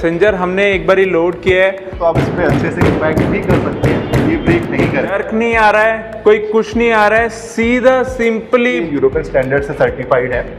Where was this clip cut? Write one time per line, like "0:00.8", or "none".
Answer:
0:01.9
0:05.2
0:08.9